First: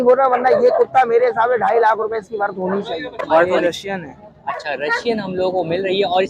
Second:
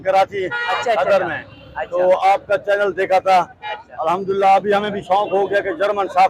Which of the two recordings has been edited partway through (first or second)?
first